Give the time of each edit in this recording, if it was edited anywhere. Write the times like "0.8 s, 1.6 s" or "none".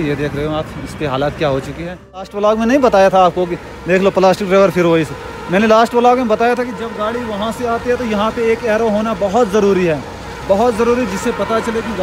2.3 s

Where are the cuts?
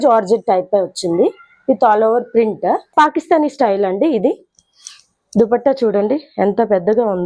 2.9 s

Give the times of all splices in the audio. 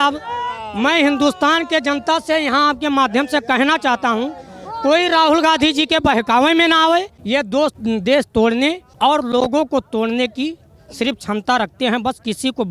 7.5 s, 8.9 s

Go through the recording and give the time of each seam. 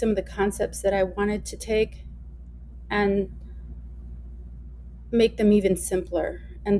none

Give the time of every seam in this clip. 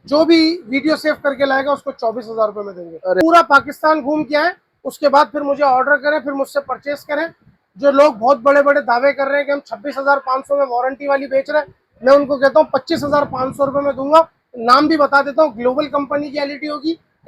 3.2 s, 7.5 s

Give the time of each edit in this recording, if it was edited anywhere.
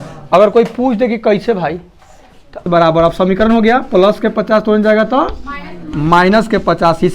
2.6 s

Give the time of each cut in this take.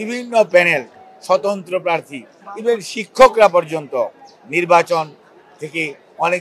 none

